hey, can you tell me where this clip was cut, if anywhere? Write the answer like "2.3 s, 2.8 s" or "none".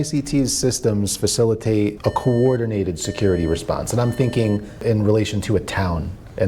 2.0 s, 4.8 s